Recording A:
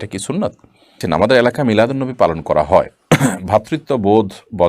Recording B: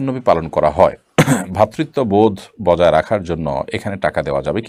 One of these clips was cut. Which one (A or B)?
A